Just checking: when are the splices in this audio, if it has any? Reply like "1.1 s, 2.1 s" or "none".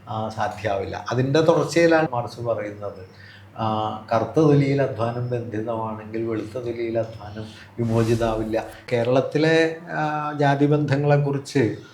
2.1 s, 8.8 s